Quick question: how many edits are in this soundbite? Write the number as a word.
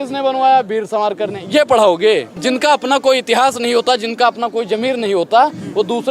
one